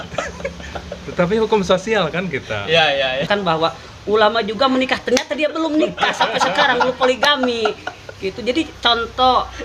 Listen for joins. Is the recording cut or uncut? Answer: cut